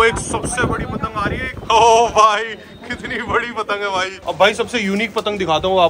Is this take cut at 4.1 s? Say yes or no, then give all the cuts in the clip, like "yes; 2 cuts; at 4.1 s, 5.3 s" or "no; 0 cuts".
yes; 2 cuts; at 1.5 s, 4.1 s